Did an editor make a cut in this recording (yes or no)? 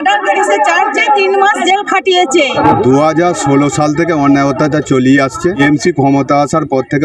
yes